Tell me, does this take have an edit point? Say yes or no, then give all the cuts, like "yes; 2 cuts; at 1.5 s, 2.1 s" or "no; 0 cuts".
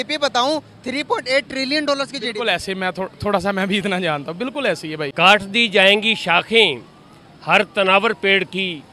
yes; 1 cut; at 5.1 s